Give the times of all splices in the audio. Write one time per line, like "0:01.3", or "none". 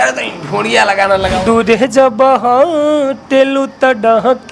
0:01.3